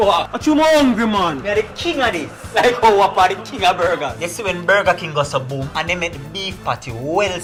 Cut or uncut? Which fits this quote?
uncut